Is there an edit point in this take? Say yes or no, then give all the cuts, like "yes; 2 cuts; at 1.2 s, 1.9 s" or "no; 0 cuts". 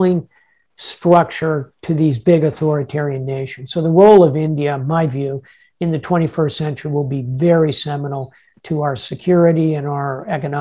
no; 0 cuts